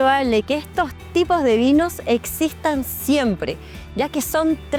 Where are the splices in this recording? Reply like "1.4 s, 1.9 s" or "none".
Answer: none